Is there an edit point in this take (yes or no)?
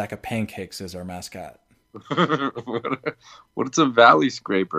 no